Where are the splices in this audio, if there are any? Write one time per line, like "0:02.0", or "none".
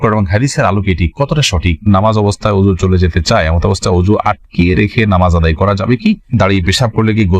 0:01.9
0:06.3